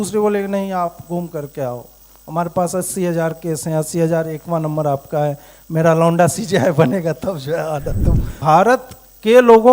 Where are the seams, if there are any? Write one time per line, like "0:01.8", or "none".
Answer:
0:08.3